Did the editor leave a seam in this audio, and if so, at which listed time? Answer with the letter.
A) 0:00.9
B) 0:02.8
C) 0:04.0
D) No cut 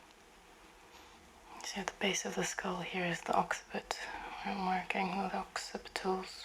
A